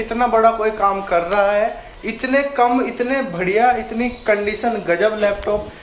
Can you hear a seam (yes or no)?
no